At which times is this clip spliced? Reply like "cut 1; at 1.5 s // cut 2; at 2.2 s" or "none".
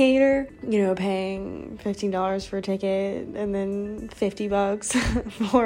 none